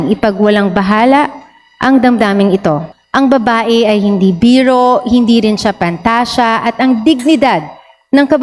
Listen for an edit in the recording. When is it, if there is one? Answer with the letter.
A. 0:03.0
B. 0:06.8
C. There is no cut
A